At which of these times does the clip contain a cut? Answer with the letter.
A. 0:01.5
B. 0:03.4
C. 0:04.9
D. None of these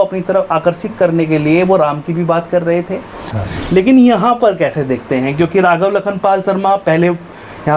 B